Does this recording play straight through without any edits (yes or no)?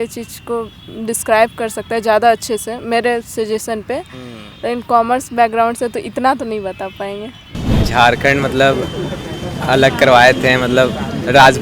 no